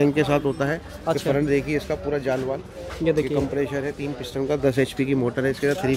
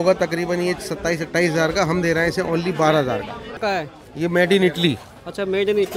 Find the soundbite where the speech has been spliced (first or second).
second